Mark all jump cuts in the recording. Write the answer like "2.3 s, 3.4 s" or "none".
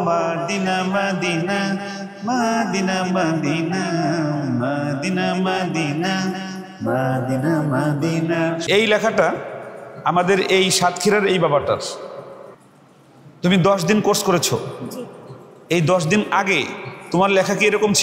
8.7 s